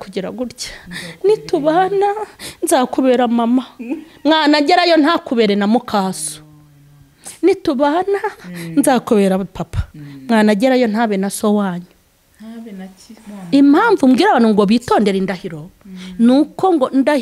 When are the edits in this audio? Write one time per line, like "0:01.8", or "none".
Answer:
none

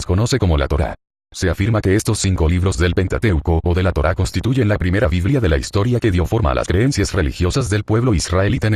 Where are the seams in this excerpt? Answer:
none

